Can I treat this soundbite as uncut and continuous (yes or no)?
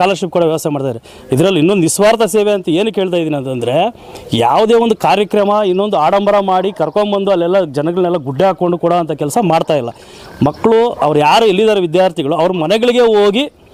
yes